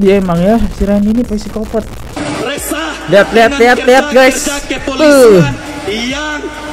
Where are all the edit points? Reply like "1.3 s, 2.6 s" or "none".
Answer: 2.0 s